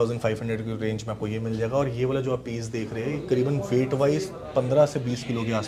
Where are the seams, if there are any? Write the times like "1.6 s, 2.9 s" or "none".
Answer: none